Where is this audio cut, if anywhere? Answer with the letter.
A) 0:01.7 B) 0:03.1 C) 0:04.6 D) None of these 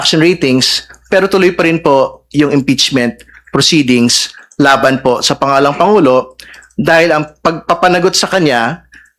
D